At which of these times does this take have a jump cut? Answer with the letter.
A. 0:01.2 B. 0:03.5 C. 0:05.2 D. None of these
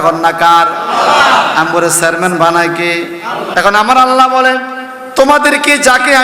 B